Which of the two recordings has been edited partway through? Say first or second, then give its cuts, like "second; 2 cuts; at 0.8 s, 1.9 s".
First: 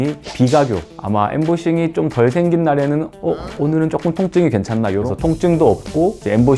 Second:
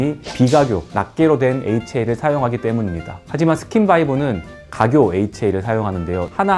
first; 3 cuts; at 0.9 s, 3.1 s, 5.0 s